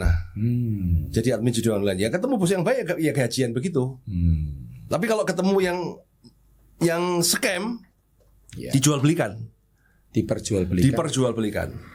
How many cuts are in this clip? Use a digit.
0